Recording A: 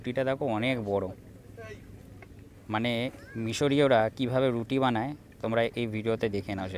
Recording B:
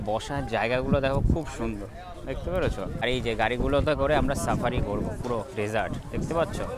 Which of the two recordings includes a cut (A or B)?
B